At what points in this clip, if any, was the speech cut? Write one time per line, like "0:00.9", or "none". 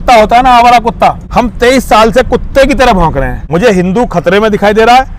0:01.2
0:03.4